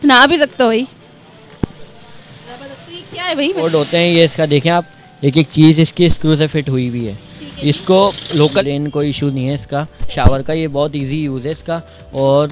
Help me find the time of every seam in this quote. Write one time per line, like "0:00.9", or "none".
0:03.6
0:08.6